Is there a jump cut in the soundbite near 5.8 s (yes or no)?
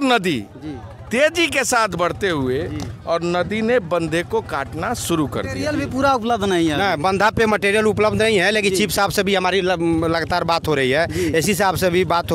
yes